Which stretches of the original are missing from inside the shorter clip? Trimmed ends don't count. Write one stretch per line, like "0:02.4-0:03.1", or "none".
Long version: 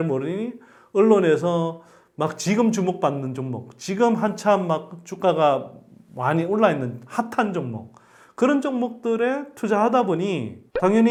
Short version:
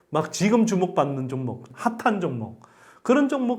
0:03.7-0:07.0